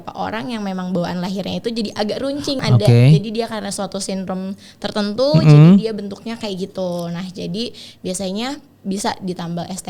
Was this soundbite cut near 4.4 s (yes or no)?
no